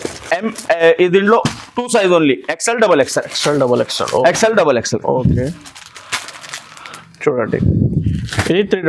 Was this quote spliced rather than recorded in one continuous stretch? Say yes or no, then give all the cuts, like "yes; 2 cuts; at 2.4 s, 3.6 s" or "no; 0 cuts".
no; 0 cuts